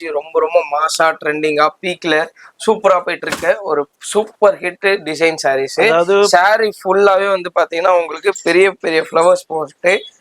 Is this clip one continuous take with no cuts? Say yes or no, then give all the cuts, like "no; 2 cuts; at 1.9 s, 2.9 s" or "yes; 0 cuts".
yes; 0 cuts